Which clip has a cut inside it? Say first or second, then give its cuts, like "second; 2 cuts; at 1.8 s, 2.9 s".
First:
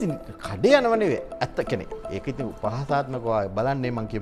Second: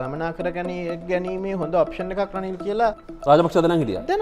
second; 1 cut; at 3.1 s